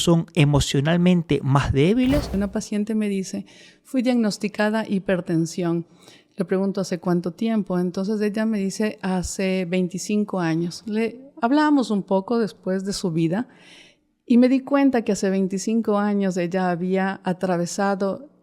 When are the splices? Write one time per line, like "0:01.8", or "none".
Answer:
0:02.3